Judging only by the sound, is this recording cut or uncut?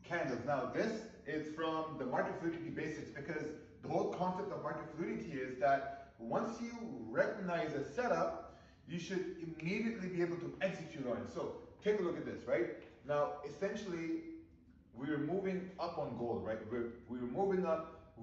cut